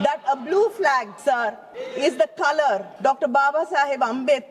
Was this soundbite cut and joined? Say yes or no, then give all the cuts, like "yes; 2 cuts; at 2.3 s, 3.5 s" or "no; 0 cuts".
yes; 2 cuts; at 1.4 s, 2.9 s